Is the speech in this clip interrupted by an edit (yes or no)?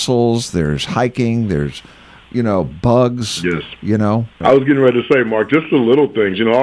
yes